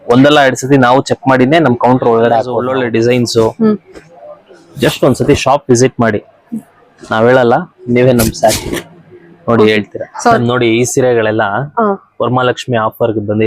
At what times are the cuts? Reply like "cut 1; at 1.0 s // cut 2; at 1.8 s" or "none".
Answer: cut 1; at 2.6 s // cut 2; at 10.4 s